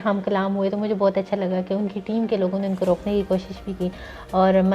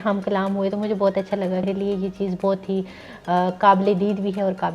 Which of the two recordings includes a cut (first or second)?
second